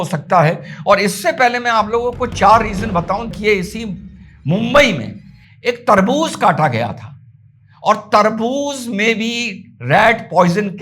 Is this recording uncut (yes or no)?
no